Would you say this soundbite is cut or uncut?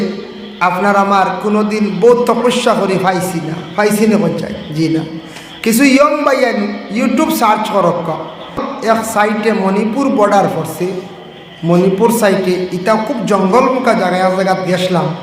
cut